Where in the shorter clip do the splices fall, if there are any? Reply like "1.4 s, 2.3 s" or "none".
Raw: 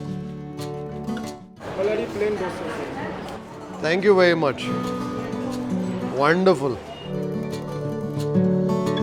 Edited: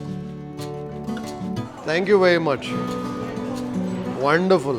1.6 s

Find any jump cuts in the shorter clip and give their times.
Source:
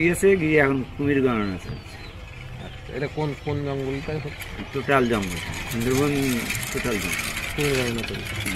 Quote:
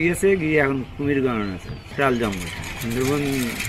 1.9 s

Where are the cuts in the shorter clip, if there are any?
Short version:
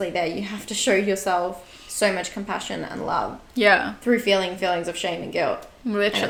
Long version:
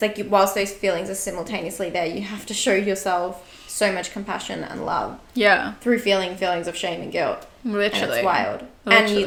none

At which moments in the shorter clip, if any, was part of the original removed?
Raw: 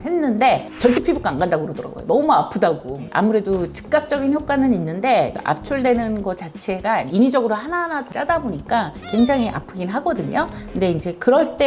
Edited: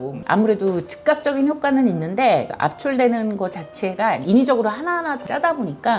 none

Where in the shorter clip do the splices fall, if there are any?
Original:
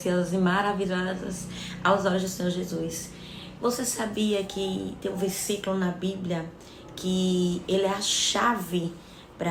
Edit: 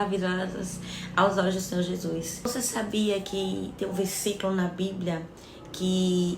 2.5 s

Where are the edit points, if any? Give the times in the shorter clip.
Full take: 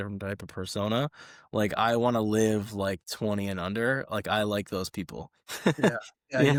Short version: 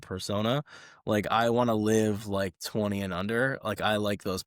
none

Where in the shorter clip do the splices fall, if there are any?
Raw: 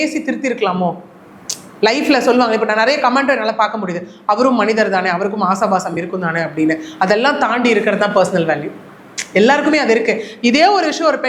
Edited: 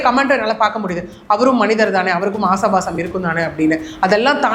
none

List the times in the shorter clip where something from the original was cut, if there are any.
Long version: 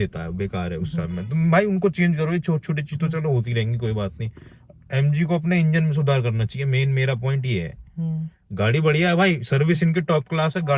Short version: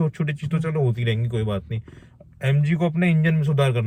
none

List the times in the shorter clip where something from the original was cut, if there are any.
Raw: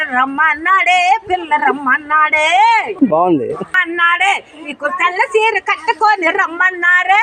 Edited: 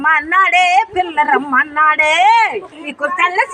2.6 s

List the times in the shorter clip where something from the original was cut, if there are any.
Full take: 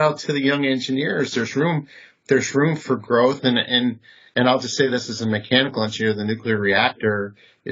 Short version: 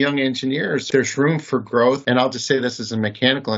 0.8 s, 2.0 s

